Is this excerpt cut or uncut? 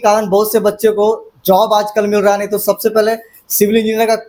uncut